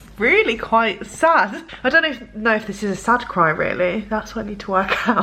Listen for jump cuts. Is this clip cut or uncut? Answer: cut